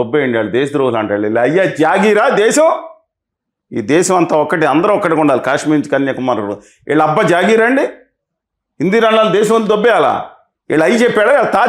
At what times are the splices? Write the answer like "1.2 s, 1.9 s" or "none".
none